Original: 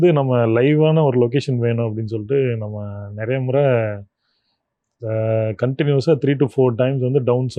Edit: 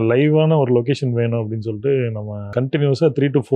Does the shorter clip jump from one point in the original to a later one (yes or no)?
yes